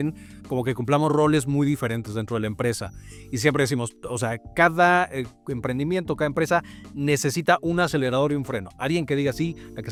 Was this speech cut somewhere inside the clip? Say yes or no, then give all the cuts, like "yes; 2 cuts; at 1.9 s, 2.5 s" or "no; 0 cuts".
no; 0 cuts